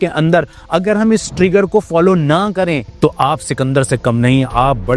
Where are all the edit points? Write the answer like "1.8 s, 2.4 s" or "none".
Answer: 2.9 s

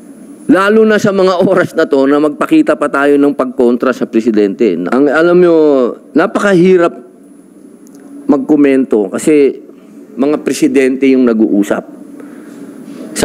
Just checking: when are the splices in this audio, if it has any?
4.9 s

